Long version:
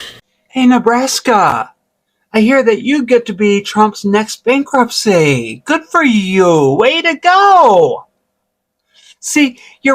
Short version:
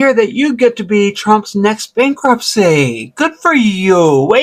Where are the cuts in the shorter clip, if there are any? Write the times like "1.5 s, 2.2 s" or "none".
none